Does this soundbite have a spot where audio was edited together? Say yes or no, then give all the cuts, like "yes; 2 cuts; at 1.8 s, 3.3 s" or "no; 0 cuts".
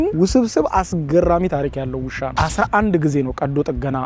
yes; 1 cut; at 2.4 s